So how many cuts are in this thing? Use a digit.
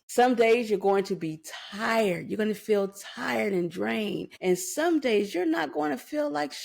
1